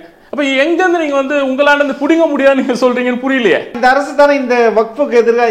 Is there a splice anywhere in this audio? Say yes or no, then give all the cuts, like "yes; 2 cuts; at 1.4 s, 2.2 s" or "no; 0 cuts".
yes; 1 cut; at 3.7 s